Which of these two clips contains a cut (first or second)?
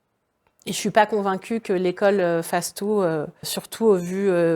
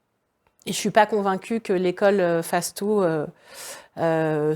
first